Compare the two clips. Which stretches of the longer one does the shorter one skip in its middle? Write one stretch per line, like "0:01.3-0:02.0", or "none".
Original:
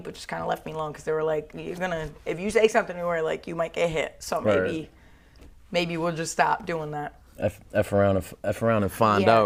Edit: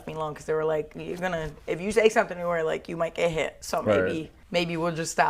0:04.9-0:05.5